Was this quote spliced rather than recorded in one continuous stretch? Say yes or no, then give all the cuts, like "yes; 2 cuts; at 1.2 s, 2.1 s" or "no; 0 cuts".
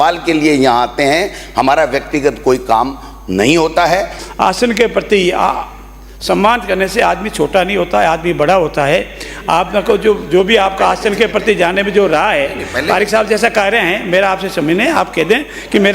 yes; 1 cut; at 4.2 s